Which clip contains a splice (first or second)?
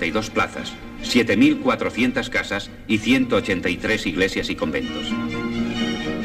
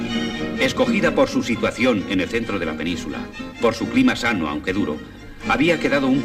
first